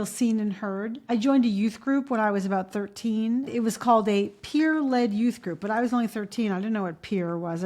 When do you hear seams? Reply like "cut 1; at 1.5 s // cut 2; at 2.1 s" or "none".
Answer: cut 1; at 3.5 s